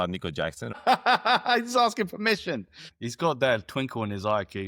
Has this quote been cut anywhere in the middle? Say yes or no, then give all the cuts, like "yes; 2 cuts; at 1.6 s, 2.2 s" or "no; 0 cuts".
yes; 2 cuts; at 0.8 s, 2.8 s